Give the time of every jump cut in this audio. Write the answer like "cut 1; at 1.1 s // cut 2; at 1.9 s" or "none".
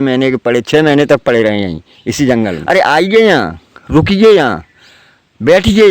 cut 1; at 2.6 s